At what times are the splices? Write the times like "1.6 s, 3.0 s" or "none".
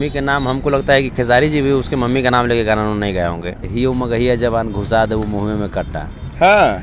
3.6 s